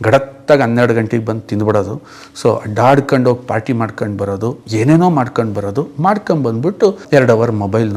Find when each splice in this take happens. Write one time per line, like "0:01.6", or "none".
0:07.0